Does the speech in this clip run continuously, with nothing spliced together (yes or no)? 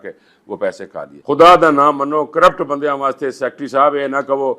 no